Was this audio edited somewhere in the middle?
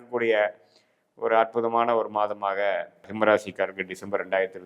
yes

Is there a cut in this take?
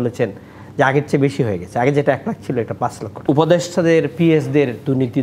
yes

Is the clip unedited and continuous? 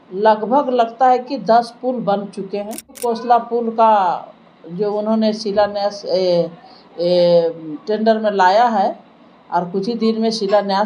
no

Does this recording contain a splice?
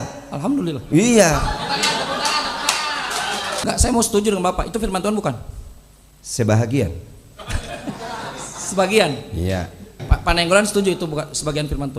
yes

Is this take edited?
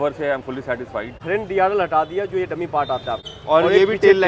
yes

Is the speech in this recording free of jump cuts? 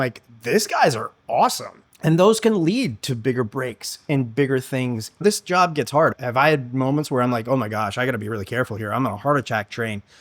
no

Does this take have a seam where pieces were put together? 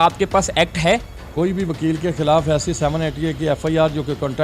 yes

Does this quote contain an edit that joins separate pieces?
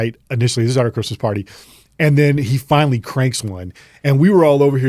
no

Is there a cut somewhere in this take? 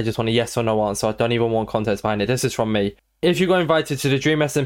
no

